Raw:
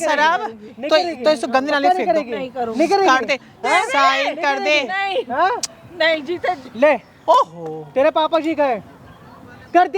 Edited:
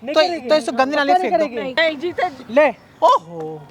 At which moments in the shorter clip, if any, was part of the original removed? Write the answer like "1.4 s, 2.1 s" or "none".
1.7 s

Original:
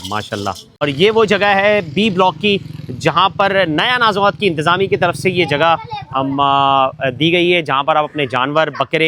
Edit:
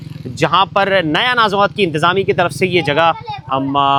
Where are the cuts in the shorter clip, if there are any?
none

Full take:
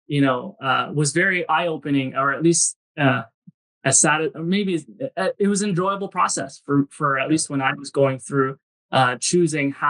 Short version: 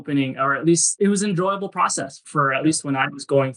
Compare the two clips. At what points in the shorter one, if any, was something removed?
1.0 s, 2.2 s

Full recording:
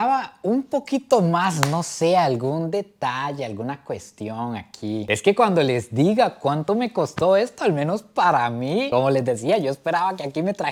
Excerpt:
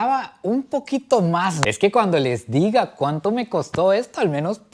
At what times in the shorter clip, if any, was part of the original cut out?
1.6 s

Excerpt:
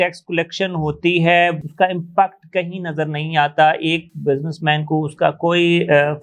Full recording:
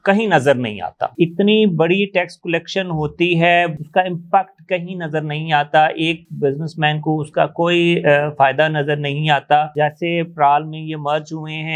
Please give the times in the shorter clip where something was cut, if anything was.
none

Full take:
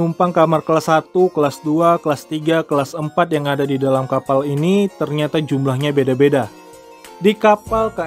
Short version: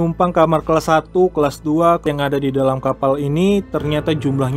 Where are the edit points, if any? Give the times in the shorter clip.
2.0 s

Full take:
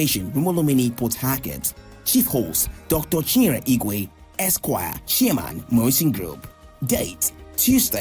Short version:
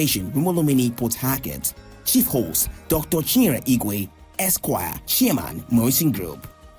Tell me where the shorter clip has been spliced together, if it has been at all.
none

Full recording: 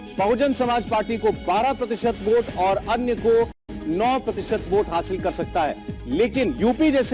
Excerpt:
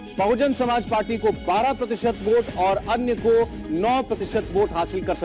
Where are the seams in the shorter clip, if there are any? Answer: 3.6 s

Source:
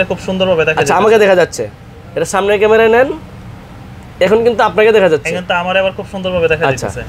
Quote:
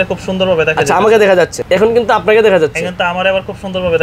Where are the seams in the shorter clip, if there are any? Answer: 1.6 s

